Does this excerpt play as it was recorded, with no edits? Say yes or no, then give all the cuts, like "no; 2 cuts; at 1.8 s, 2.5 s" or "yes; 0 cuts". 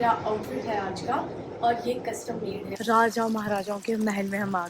no; 1 cut; at 2.7 s